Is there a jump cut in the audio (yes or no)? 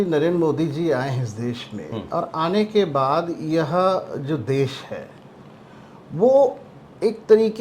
no